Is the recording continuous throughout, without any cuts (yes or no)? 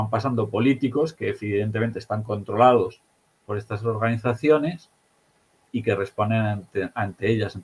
yes